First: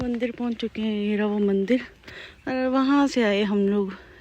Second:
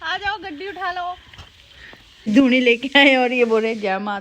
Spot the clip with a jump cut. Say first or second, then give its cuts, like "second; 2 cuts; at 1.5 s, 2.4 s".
second; 1 cut; at 2.3 s